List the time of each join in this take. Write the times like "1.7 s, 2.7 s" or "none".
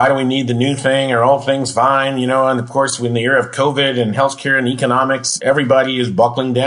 5.3 s